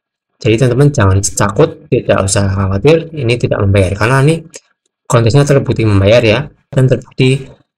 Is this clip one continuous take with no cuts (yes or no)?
no